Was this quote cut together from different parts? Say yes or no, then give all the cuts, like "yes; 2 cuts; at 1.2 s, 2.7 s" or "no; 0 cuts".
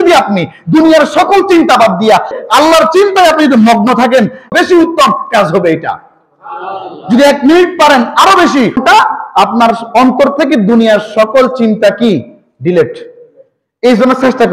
yes; 3 cuts; at 2.4 s, 4.5 s, 8.8 s